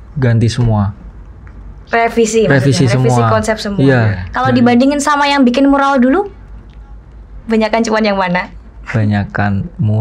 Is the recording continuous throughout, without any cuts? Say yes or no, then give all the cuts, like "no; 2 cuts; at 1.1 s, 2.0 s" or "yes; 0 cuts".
no; 1 cut; at 4.2 s